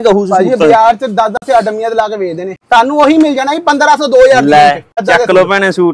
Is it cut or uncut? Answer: cut